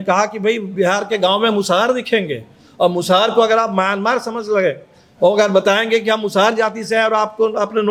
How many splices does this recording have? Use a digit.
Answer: 0